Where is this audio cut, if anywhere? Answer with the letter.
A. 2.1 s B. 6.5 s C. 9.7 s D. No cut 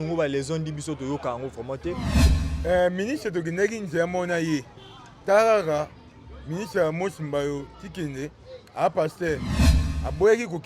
A